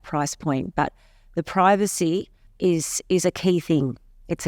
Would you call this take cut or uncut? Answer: cut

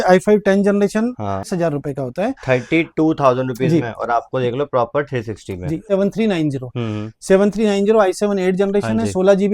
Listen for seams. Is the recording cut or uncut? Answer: cut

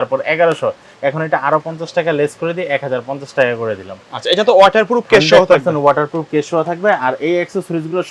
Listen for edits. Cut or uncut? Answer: uncut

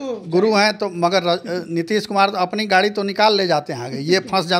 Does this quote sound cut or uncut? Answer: uncut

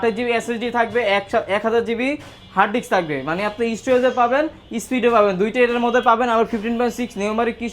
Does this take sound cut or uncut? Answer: uncut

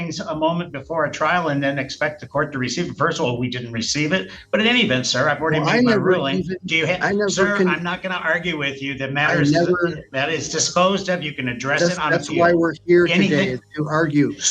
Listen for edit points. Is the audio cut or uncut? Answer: uncut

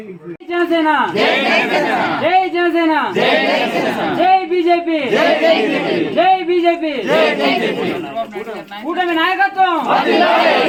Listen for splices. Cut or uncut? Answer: uncut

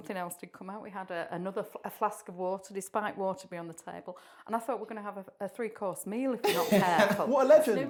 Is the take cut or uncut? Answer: uncut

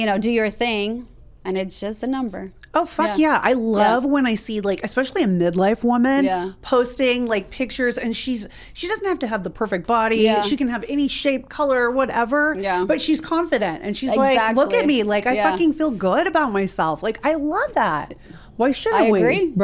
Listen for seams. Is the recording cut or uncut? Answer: uncut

